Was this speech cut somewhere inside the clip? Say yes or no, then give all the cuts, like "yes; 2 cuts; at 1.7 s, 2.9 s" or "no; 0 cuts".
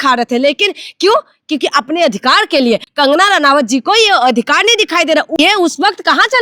yes; 2 cuts; at 2.9 s, 5.4 s